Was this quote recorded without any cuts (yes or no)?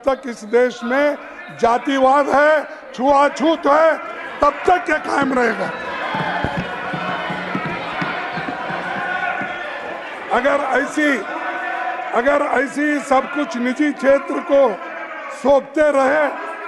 yes